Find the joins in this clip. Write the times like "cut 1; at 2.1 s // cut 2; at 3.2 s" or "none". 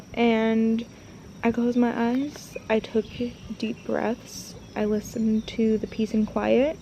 none